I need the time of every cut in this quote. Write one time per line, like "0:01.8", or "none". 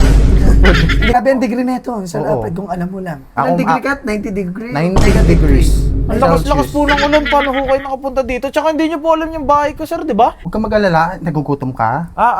0:01.1
0:10.4